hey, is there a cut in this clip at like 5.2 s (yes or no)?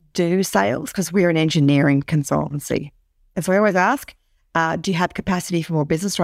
no